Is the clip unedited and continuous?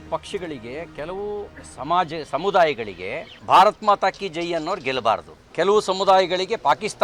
yes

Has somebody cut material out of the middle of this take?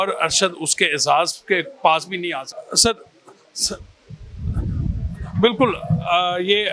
yes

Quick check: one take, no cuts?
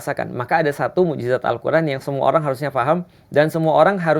yes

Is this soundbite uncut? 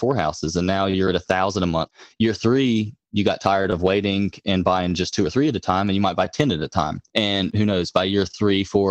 no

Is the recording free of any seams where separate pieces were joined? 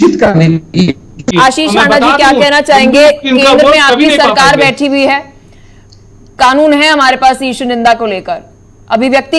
no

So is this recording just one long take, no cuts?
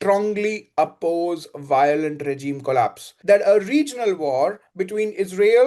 no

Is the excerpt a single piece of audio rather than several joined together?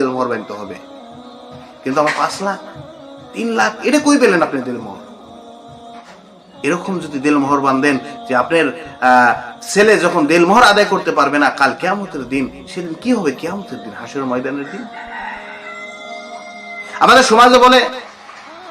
no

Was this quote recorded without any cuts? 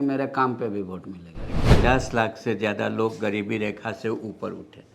no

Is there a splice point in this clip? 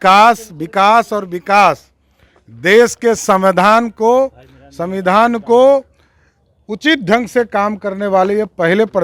no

